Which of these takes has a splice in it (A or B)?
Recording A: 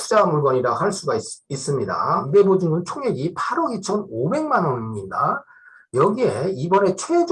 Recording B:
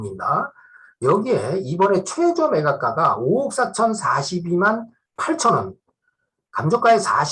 A